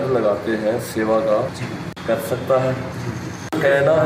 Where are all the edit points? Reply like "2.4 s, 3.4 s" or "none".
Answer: none